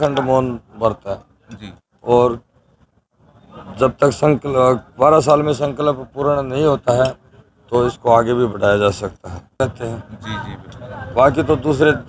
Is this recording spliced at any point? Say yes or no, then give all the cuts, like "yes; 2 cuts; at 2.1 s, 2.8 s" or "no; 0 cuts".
yes; 1 cut; at 9.6 s